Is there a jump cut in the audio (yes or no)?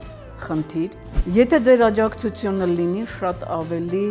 yes